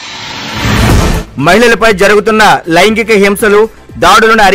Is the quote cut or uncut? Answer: uncut